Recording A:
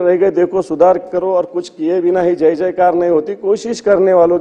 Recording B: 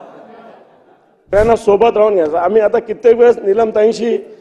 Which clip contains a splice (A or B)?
B